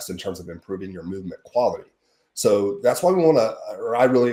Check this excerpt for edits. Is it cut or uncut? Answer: uncut